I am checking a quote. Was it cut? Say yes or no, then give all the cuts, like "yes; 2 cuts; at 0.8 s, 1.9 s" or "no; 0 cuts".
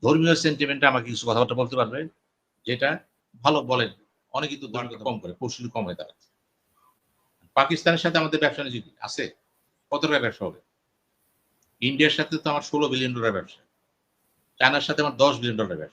yes; 1 cut; at 4.9 s